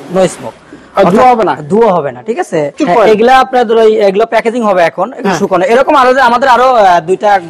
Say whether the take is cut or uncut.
cut